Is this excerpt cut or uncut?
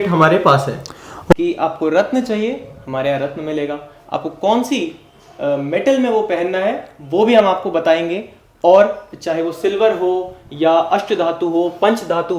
cut